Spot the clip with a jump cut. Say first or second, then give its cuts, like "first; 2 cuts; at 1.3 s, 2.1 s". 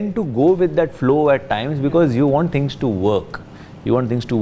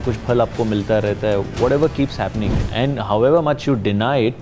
second; 1 cut; at 2.6 s